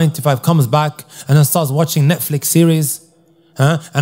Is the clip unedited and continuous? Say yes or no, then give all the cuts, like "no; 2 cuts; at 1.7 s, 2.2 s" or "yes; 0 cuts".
yes; 0 cuts